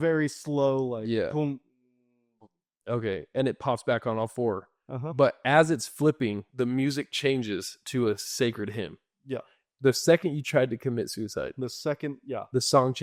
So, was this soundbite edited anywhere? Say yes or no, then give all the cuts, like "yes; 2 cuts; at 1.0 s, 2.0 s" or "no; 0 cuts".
no; 0 cuts